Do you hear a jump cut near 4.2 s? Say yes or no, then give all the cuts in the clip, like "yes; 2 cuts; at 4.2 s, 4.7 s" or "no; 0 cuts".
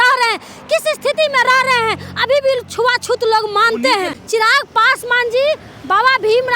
yes; 1 cut; at 4.2 s